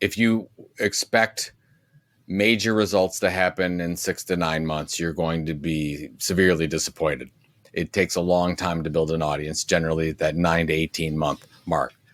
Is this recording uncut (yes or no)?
yes